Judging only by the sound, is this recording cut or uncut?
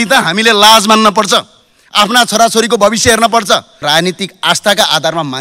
cut